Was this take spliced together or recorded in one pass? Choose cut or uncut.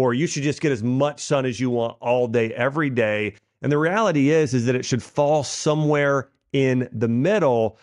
uncut